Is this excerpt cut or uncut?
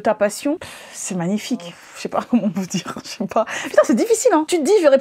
cut